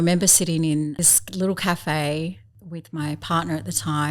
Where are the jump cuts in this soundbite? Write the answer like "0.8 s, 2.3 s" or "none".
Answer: 1.0 s, 2.6 s